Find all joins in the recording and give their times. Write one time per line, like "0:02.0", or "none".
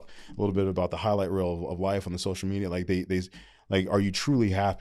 none

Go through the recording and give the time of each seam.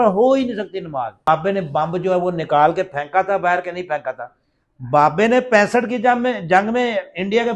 0:01.3

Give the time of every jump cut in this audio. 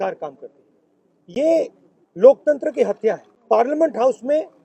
0:03.3

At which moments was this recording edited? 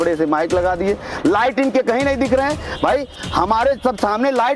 0:02.6

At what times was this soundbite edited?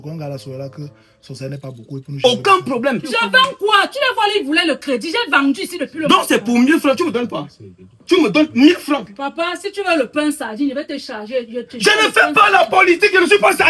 0:02.2

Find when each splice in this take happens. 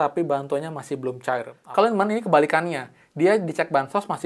0:01.6

